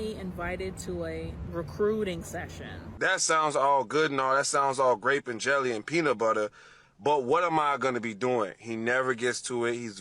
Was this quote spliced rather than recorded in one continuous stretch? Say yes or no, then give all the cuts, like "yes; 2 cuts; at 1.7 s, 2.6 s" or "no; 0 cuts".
yes; 2 cuts; at 1.4 s, 2.9 s